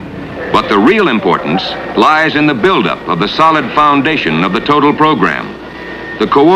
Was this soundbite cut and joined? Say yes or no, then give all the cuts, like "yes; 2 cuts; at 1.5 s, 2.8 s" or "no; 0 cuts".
no; 0 cuts